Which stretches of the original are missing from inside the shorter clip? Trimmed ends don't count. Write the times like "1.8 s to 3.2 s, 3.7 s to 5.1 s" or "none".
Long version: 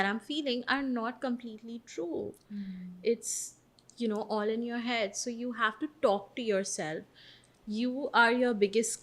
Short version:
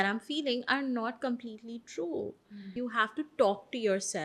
2.6 s to 5.3 s